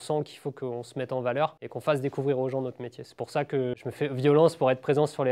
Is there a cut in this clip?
yes; 2 cuts; at 1.7 s, 3.7 s

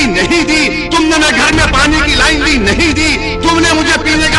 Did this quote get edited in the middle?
no; 0 cuts

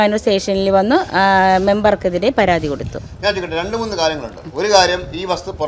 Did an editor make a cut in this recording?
no; 0 cuts

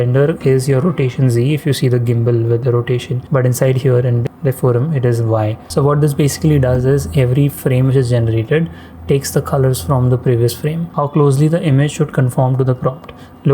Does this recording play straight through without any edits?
no; 4 cuts; at 3.2 s, 4.3 s, 5.6 s, 10.8 s

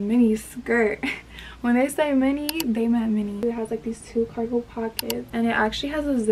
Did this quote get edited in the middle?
no; 0 cuts

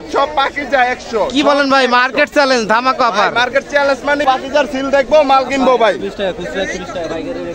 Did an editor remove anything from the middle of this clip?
yes; 1 cut; at 4.2 s

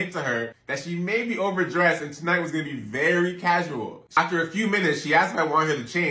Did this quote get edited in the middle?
yes; 1 cut; at 4.2 s

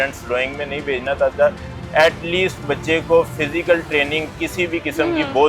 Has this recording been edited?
no; 0 cuts

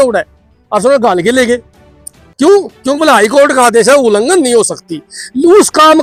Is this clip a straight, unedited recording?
yes; 0 cuts

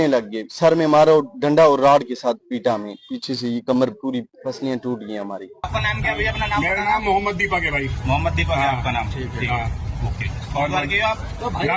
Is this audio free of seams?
no; 2 cuts; at 4.3 s, 5.7 s

